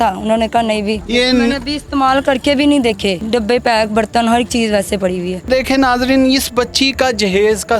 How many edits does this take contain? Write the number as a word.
three